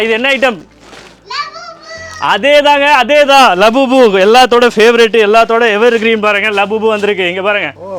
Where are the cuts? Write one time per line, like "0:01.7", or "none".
none